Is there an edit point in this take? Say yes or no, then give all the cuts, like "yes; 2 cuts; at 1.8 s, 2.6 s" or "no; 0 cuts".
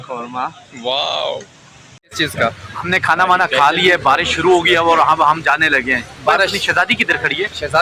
yes; 1 cut; at 2.1 s